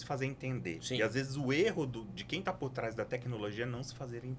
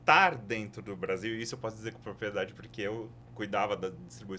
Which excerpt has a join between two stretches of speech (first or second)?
second